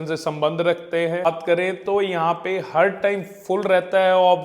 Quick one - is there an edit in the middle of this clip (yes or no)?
yes